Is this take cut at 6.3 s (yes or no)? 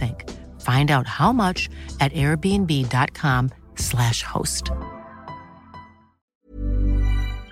yes